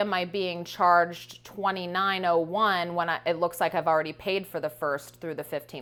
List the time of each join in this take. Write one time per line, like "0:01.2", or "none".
none